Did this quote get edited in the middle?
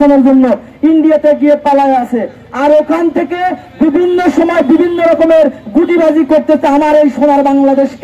no; 0 cuts

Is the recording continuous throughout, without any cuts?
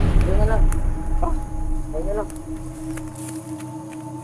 yes; 0 cuts

